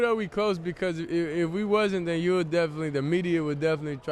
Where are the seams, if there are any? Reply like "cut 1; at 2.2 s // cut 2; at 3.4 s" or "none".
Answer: none